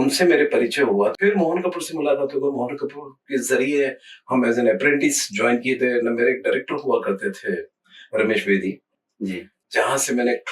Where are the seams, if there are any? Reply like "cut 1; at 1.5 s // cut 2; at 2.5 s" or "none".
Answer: cut 1; at 1.2 s